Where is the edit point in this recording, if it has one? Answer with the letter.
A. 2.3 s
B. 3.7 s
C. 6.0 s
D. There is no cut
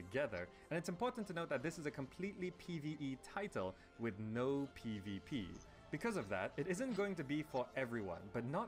A